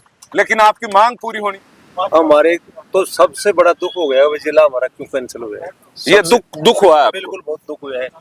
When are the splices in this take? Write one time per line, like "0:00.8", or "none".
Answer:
0:01.6